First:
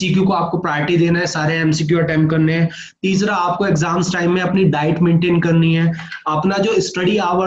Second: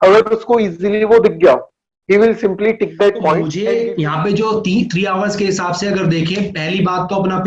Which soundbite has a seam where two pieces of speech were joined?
second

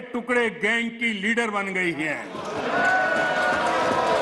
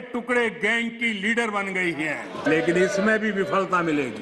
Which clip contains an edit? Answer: second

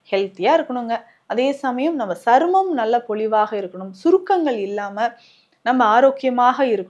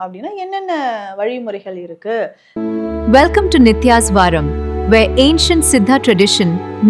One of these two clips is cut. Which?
second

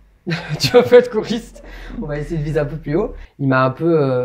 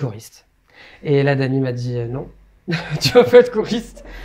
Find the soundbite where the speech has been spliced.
first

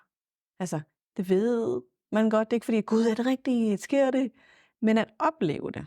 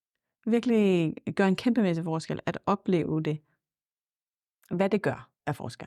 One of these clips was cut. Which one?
first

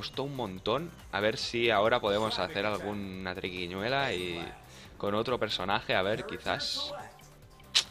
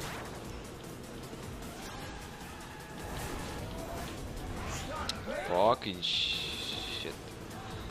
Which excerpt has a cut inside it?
first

